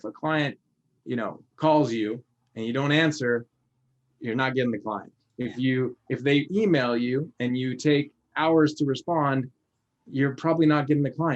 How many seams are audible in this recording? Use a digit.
0